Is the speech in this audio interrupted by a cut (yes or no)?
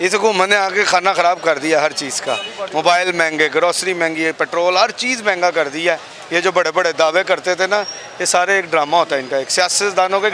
no